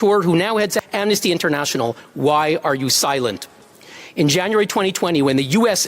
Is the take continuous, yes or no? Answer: no